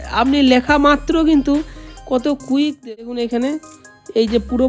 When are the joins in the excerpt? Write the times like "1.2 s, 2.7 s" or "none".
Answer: 2.8 s